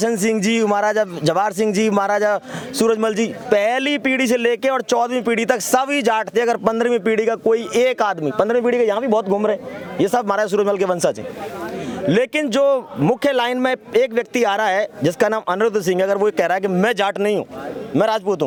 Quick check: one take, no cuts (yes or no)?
yes